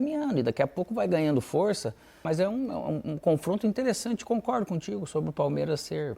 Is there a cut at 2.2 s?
yes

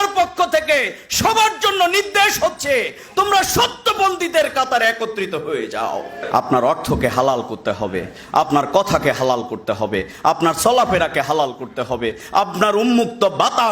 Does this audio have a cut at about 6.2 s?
yes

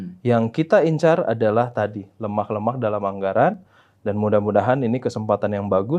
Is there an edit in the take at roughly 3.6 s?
no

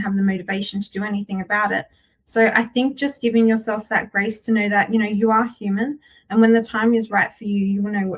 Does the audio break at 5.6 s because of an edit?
no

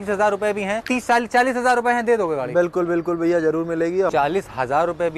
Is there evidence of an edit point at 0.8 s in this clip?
yes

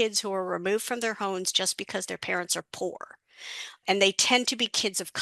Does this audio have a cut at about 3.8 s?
yes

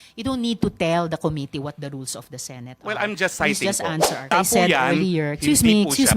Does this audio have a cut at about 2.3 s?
no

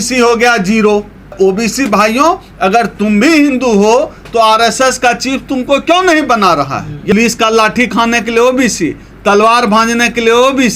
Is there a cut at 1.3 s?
yes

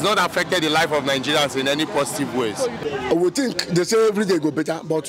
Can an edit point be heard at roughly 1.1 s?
no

